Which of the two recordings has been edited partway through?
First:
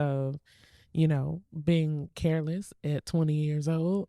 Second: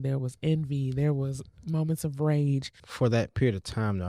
second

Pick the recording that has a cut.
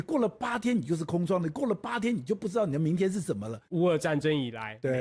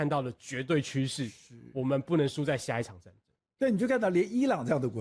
first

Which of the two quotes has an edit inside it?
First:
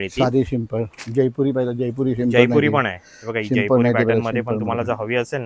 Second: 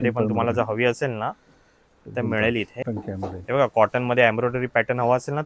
second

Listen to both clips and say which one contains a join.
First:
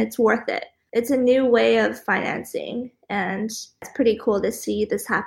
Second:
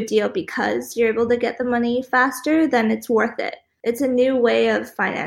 first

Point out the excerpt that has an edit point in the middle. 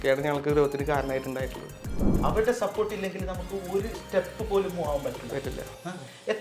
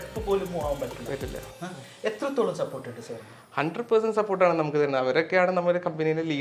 first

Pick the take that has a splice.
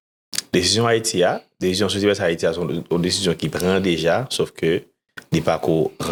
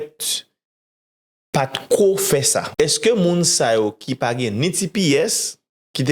second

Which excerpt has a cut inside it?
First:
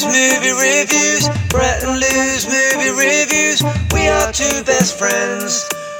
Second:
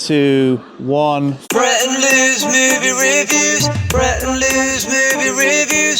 second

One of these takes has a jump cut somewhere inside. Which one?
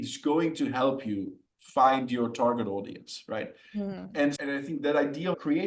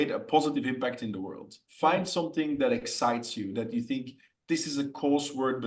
second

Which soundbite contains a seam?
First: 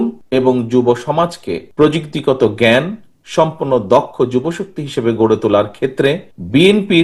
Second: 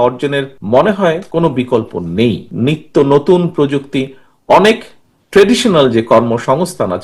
second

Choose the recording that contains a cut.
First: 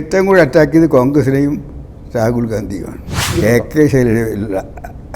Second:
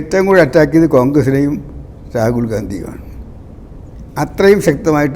first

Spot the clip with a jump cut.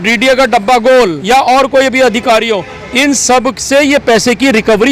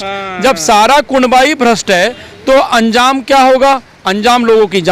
first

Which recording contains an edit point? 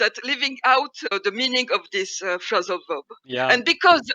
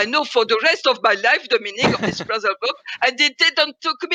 first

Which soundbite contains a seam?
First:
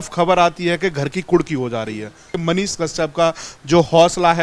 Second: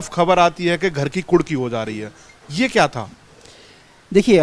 first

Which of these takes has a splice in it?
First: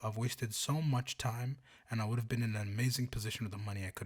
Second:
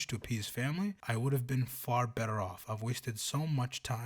second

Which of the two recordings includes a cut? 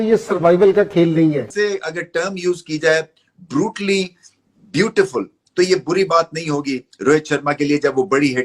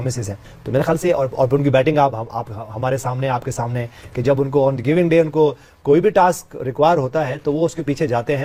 first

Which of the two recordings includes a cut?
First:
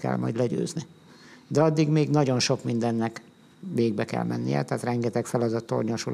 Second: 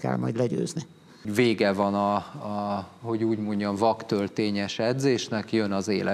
second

